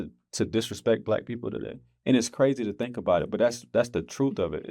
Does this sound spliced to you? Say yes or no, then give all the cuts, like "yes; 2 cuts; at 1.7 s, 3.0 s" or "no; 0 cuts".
no; 0 cuts